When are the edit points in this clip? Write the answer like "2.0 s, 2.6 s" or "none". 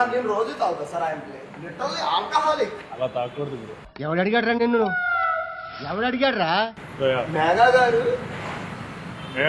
6.8 s